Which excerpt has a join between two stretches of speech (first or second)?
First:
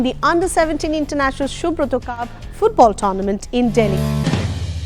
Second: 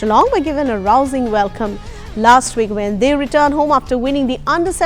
first